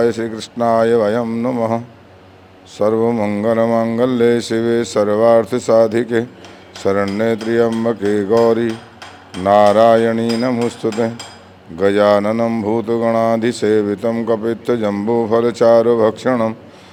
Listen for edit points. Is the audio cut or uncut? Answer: uncut